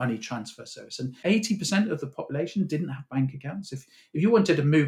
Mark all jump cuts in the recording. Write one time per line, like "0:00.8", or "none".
0:01.2